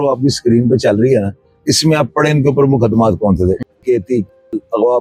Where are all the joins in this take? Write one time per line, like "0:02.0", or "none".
none